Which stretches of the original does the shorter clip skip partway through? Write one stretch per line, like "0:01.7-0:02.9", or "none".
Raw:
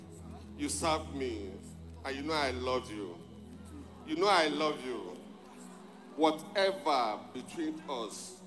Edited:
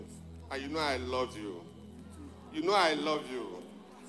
none